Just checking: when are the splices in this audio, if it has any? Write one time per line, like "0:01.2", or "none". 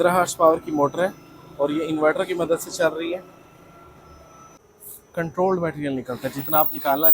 0:04.6